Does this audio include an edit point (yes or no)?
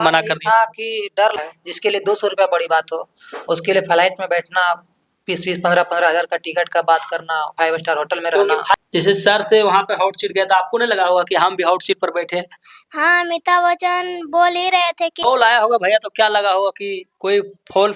yes